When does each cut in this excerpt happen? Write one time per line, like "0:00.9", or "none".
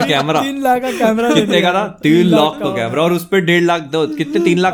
none